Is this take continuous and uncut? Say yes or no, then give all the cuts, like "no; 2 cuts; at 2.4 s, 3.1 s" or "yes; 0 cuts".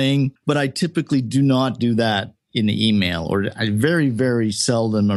yes; 0 cuts